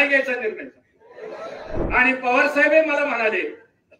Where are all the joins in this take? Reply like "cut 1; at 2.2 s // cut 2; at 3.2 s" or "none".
cut 1; at 1.8 s